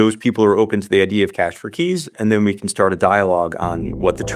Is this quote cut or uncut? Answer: uncut